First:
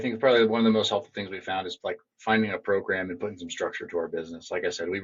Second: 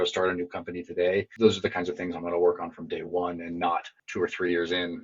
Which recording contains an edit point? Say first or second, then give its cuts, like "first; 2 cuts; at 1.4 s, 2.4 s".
second; 2 cuts; at 1.3 s, 4.0 s